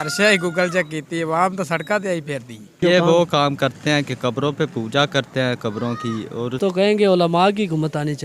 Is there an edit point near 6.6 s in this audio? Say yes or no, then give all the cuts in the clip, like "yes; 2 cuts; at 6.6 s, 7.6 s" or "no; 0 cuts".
yes; 2 cuts; at 2.8 s, 6.6 s